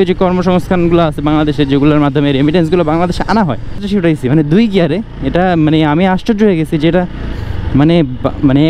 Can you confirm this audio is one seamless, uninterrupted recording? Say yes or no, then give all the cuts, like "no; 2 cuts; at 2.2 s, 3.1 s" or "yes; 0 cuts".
no; 1 cut; at 3.8 s